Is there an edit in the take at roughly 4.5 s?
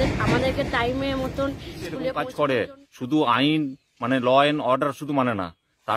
no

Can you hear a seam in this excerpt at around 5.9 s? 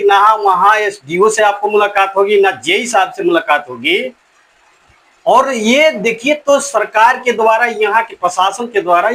no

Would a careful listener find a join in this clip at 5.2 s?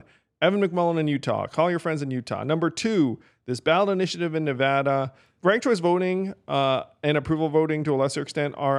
yes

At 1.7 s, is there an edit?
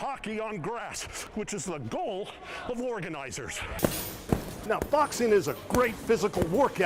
no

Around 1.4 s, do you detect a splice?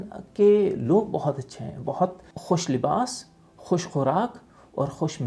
no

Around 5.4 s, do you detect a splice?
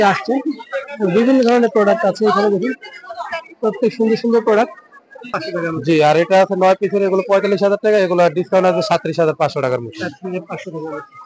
yes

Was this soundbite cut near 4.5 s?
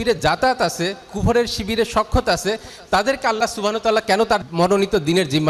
yes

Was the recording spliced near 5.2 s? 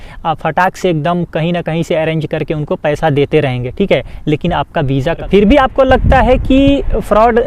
yes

